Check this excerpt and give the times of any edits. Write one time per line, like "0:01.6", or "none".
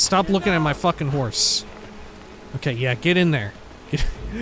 0:01.3